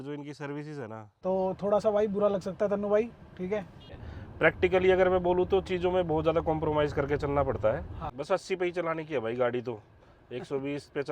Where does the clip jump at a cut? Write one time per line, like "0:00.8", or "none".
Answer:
0:01.1
0:04.0
0:08.1

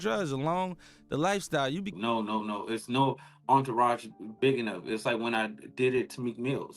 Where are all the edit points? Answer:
0:01.9

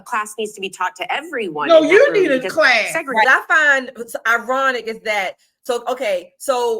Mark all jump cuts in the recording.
0:03.2

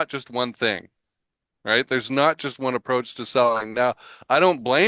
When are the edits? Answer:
none

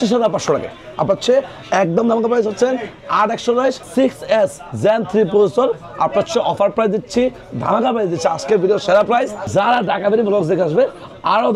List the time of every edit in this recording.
0:03.8
0:09.4

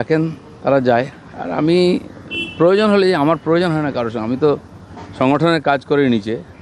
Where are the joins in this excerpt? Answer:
none

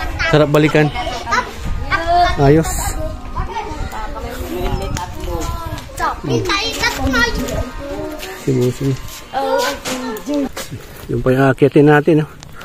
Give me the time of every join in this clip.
none

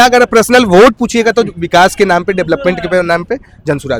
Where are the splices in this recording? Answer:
none

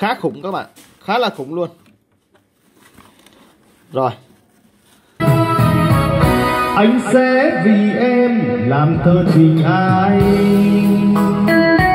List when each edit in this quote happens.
0:05.1

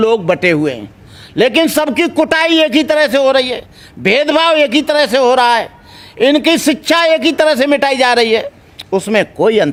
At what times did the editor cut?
none

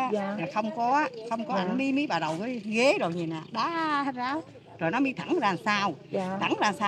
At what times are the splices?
none

